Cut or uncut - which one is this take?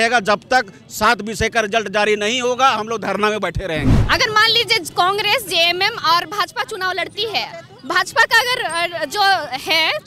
cut